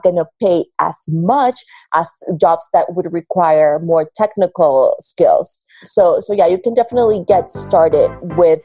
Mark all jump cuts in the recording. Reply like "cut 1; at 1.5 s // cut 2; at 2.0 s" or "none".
none